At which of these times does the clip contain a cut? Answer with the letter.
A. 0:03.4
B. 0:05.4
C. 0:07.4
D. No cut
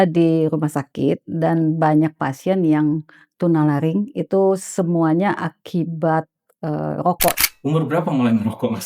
C